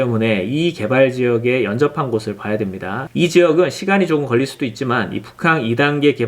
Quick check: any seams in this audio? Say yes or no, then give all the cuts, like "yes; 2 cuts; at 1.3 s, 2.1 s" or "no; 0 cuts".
yes; 1 cut; at 3.0 s